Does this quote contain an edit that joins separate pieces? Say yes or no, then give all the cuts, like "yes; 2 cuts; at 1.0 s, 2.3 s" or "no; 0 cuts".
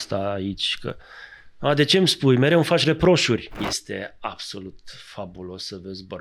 yes; 1 cut; at 3.6 s